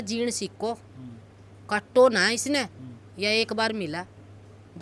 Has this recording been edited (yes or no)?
no